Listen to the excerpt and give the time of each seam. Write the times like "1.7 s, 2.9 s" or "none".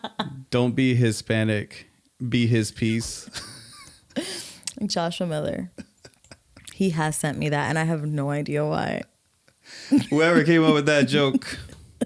none